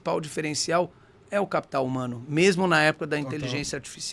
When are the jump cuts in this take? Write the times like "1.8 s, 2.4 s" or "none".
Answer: none